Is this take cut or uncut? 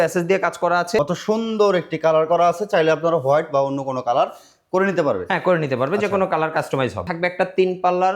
cut